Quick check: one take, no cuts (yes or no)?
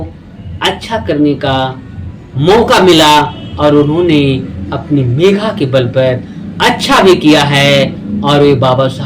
yes